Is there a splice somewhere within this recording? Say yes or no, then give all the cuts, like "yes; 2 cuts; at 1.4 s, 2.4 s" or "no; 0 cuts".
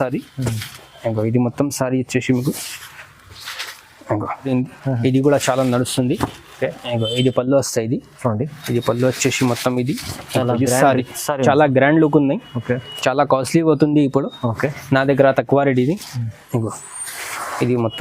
yes; 1 cut; at 4.5 s